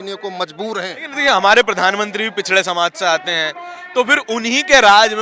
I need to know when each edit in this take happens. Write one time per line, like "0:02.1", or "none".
0:01.0